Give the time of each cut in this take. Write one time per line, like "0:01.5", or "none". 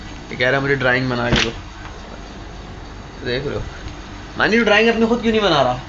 none